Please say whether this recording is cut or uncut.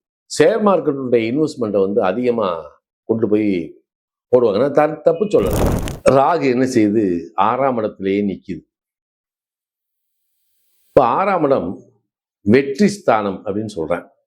cut